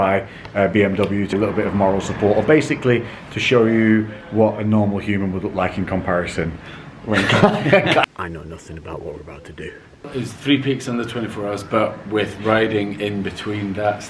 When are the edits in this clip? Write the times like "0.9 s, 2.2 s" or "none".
1.3 s, 8.0 s, 10.1 s